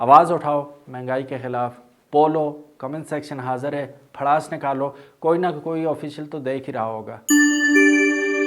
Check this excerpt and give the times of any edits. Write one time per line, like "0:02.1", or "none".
0:07.2